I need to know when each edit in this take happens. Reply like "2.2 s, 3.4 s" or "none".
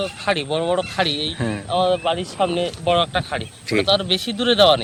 none